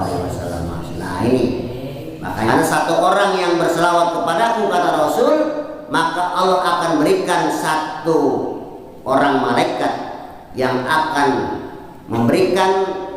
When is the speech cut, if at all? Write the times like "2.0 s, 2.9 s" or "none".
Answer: 2.5 s